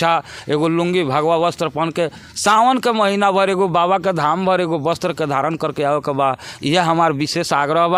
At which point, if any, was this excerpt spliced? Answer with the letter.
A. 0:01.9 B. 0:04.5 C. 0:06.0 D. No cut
D